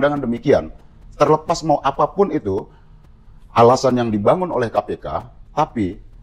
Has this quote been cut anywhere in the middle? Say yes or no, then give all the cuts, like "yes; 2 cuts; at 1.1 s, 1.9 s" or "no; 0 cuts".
no; 0 cuts